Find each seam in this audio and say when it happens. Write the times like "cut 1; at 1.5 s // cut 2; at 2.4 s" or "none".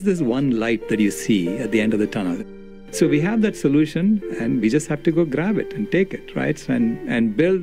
cut 1; at 2.4 s